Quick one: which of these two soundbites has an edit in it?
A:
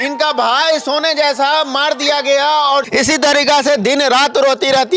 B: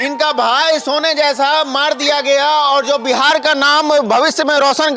A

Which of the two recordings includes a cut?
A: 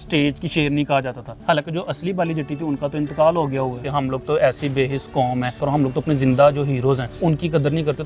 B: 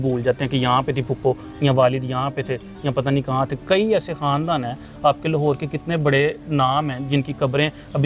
A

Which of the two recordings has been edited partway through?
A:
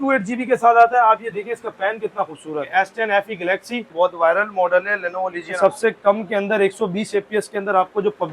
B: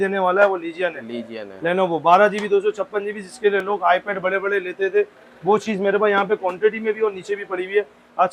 A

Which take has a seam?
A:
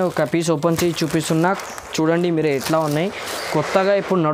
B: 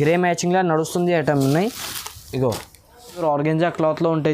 B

